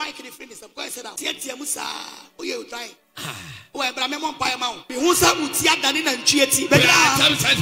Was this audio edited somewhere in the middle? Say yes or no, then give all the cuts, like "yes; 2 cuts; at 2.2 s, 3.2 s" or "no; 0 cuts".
yes; 2 cuts; at 1.1 s, 4.8 s